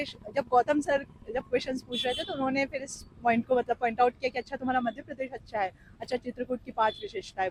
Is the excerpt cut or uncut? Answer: uncut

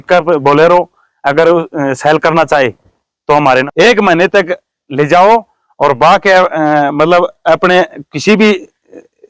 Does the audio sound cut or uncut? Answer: cut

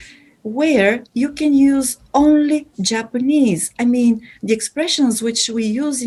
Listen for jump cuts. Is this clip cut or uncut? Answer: uncut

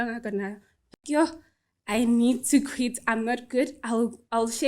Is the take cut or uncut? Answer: cut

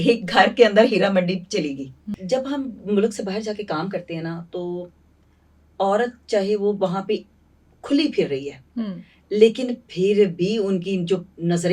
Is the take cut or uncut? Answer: cut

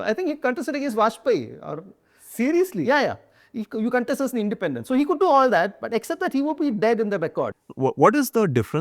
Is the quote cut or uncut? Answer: cut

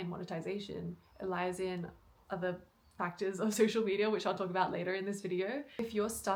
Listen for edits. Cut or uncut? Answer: uncut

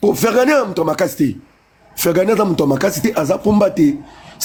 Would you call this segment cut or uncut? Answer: uncut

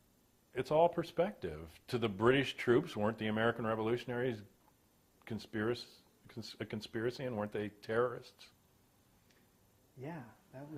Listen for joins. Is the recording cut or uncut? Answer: cut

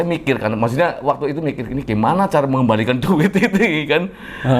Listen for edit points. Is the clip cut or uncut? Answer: uncut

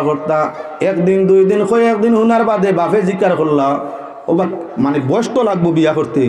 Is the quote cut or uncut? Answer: uncut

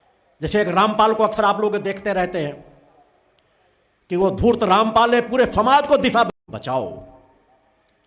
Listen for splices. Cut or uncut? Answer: cut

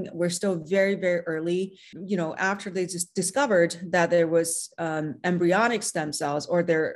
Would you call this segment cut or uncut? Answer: cut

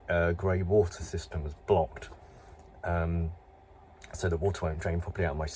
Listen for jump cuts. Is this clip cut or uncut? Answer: uncut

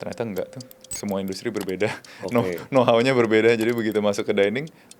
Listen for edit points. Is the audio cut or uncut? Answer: uncut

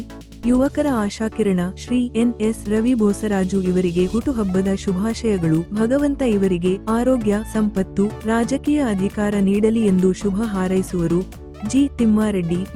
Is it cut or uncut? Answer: uncut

